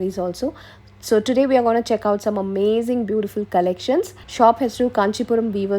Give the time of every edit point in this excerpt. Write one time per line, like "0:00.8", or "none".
0:04.2